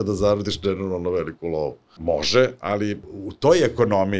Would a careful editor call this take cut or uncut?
cut